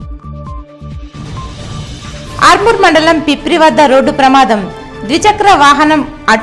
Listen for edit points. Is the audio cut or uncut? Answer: uncut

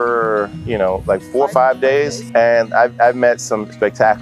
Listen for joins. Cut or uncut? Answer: uncut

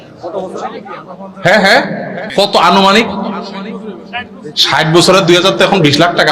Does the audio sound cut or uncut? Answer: cut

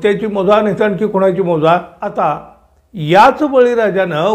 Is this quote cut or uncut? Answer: cut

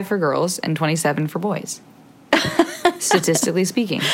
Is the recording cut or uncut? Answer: uncut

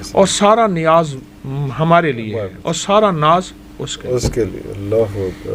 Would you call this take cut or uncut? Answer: uncut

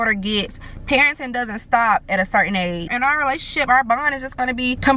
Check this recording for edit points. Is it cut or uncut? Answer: cut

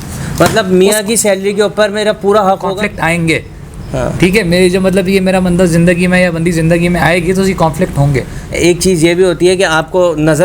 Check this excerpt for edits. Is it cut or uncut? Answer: cut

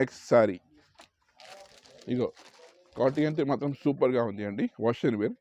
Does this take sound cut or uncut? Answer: uncut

